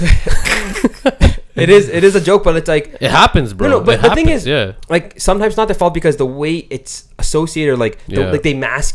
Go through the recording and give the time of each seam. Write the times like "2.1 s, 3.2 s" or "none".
none